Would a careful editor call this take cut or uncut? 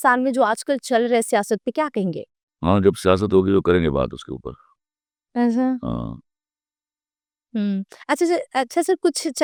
uncut